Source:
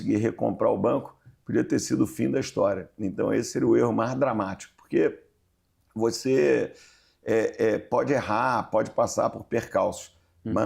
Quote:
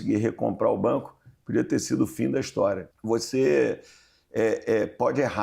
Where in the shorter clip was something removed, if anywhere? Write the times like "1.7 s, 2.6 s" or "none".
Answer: 2.9 s